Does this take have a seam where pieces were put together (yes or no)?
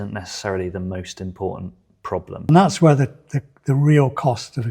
yes